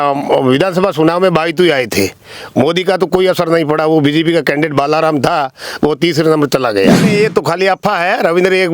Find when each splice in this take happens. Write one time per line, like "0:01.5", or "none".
0:07.1